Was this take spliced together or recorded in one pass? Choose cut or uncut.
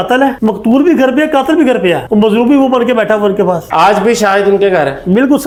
uncut